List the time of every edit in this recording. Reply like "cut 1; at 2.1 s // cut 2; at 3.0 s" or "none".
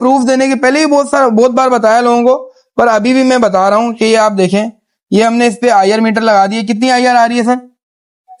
none